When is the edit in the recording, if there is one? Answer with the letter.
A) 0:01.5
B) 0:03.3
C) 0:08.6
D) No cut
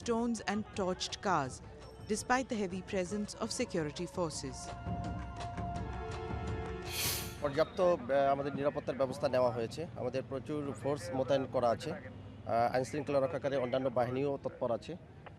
A